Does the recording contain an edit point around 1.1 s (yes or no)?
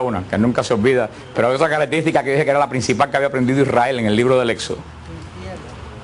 yes